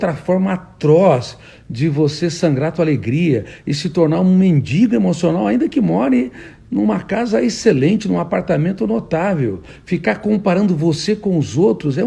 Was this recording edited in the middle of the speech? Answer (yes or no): no